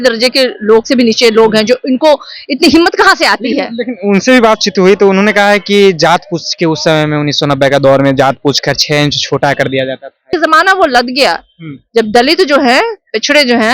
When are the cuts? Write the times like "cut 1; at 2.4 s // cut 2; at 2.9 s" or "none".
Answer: cut 1; at 10.3 s